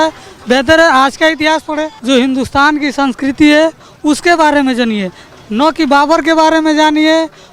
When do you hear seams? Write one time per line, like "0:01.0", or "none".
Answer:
0:01.9